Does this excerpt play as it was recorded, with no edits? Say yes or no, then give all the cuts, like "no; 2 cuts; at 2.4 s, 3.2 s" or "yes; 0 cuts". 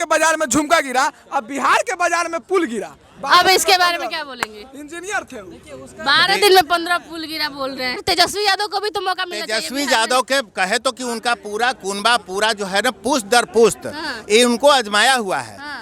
no; 1 cut; at 8.0 s